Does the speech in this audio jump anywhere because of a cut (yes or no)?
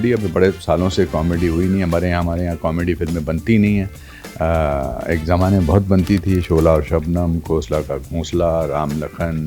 no